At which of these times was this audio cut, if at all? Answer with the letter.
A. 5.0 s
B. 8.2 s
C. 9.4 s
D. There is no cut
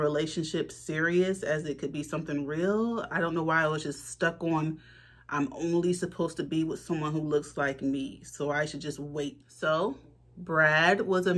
C